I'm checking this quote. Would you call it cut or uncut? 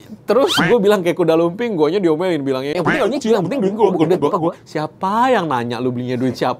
uncut